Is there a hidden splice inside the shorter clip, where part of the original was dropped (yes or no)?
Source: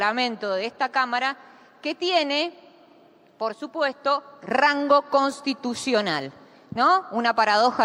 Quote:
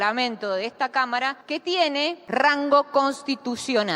yes